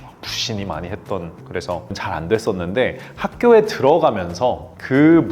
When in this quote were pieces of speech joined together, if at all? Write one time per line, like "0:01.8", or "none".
0:01.4